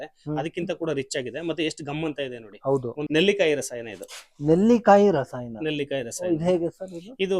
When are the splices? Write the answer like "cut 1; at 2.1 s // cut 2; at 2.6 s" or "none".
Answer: cut 1; at 3.1 s